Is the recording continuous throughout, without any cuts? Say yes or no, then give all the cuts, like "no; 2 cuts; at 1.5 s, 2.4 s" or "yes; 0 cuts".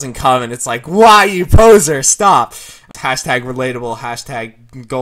no; 1 cut; at 2.9 s